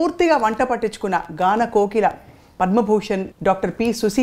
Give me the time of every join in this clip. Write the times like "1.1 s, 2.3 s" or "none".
3.3 s

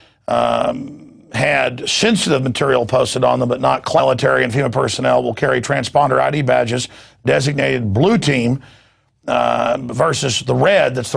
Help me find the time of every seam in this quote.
none

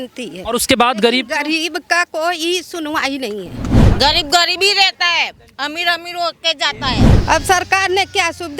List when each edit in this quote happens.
3.8 s, 7.1 s

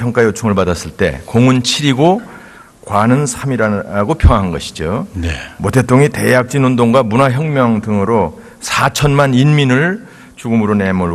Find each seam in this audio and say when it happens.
3.4 s

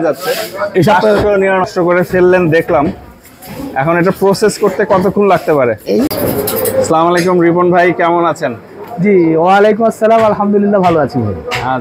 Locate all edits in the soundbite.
1.7 s, 6.1 s

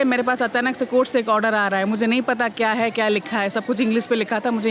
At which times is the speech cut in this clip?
none

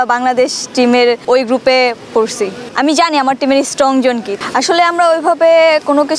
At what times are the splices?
1.2 s, 2.7 s, 4.3 s

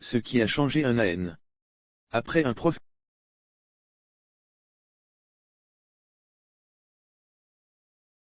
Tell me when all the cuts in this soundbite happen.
none

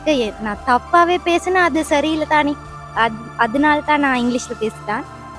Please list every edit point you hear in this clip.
none

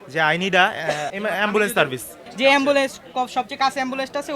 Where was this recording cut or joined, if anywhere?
1.1 s, 2.2 s

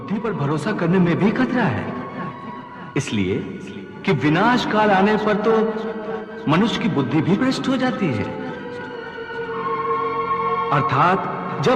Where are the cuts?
none

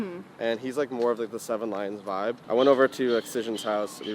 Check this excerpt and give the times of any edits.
2.4 s

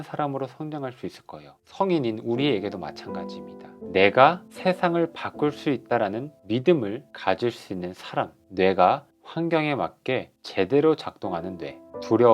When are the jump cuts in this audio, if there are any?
1.6 s

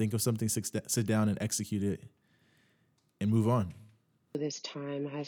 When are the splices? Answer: 4.3 s

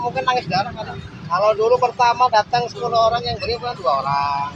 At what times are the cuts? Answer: 1.0 s

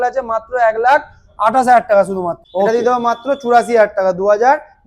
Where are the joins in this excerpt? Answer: 2.4 s

